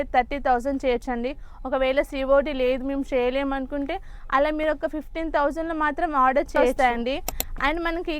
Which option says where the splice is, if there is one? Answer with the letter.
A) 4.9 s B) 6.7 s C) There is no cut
B